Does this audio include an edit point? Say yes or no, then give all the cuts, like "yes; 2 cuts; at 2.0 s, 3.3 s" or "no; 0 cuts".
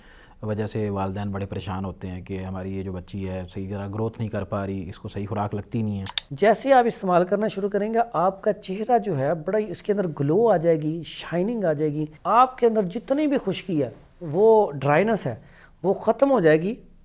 yes; 2 cuts; at 6.1 s, 12.1 s